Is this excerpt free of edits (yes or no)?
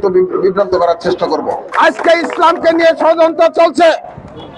no